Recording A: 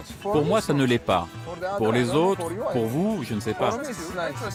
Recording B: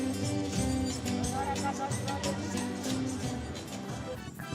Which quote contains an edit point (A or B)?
B